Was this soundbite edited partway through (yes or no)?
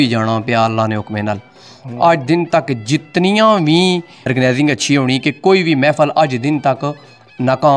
yes